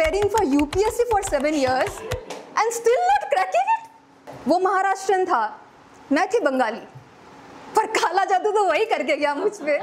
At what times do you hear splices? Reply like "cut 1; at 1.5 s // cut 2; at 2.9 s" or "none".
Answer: cut 1; at 4.3 s